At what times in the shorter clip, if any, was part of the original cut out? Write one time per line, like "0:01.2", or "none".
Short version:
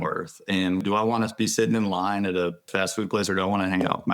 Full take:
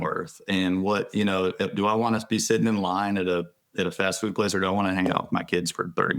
0:00.8
0:02.7